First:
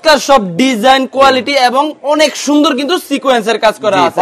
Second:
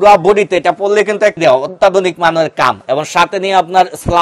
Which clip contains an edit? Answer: second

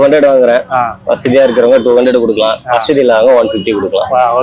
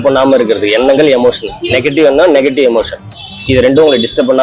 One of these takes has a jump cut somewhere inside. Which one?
first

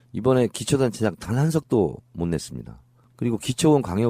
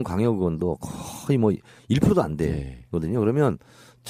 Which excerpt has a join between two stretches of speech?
first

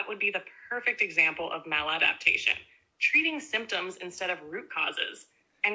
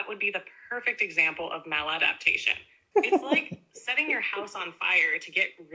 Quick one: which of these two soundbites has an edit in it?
second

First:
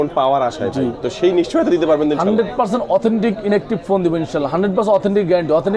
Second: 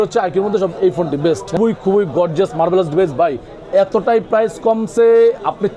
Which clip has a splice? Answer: second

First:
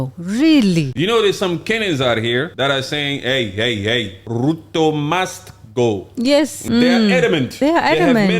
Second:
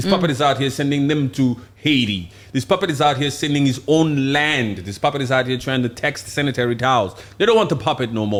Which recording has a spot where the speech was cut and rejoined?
first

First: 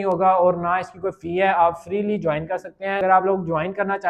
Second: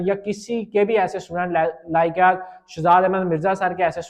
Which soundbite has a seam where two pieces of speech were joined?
first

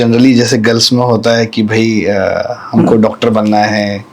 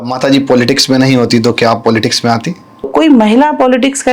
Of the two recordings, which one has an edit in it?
second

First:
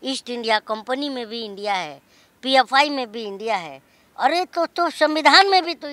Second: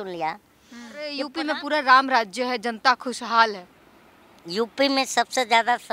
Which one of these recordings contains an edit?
second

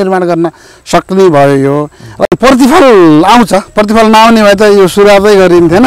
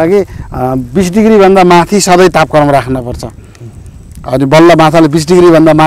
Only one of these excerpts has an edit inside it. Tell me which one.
first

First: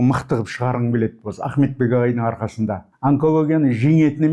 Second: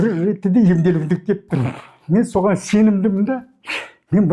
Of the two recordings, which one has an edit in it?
first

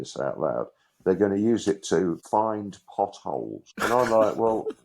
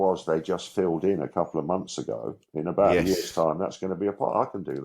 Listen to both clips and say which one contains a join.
first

